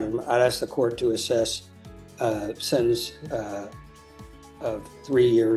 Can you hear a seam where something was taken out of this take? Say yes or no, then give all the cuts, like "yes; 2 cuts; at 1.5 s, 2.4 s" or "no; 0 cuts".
no; 0 cuts